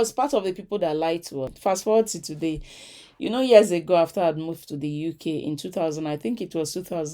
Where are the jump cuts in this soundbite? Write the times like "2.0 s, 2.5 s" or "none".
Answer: 1.4 s